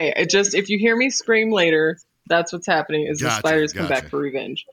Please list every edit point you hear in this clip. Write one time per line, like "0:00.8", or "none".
none